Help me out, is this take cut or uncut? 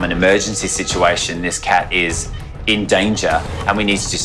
uncut